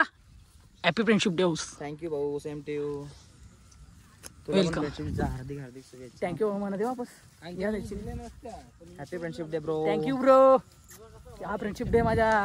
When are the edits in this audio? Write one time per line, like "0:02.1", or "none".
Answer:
none